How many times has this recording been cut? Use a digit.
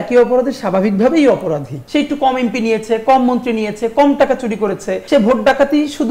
2